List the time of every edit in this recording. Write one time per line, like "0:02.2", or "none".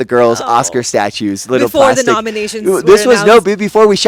none